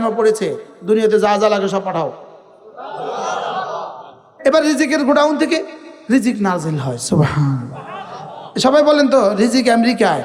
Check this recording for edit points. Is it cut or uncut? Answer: uncut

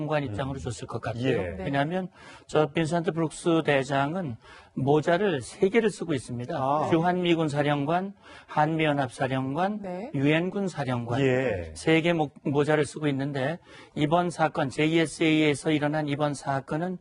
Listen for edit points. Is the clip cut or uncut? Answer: cut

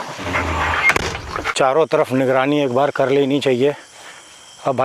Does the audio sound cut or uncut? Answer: cut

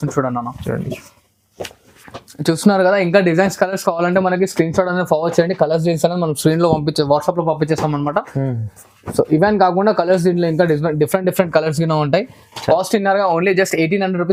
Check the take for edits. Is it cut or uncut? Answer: uncut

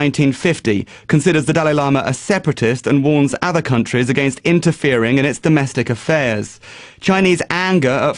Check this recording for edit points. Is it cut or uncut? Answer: uncut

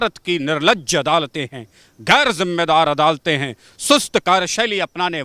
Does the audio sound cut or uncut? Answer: uncut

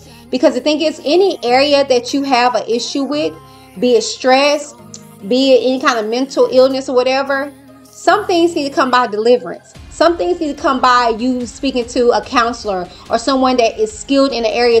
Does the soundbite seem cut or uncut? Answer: uncut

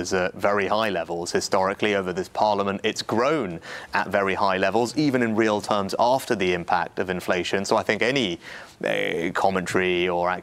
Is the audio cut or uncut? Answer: uncut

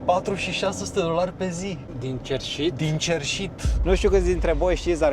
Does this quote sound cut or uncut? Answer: cut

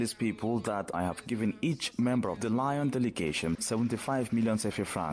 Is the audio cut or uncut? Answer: cut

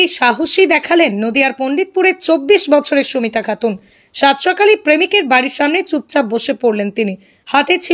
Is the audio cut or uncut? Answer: cut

